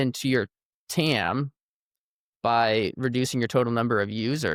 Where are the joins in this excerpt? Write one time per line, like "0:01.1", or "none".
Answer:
none